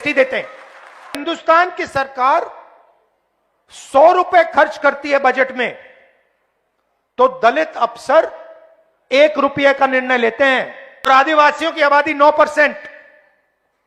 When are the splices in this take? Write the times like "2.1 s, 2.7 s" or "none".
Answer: 1.2 s, 11.1 s

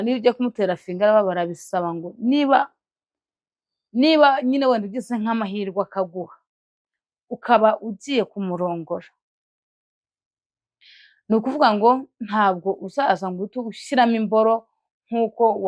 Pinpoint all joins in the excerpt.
none

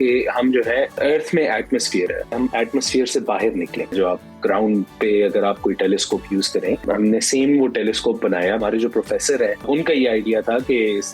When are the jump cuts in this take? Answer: 0.9 s, 2.4 s, 3.9 s, 6.8 s, 8.6 s, 9.7 s

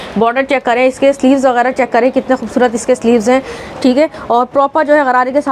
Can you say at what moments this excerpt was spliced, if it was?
none

